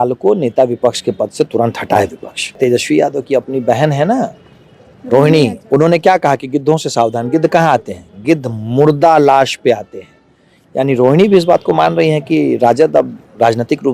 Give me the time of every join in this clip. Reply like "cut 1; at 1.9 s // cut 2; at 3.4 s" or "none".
cut 1; at 2.6 s